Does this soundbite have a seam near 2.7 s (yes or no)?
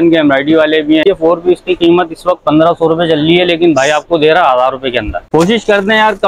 no